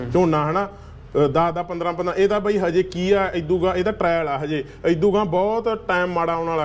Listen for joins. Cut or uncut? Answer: uncut